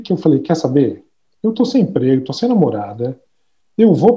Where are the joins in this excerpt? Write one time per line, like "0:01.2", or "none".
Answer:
none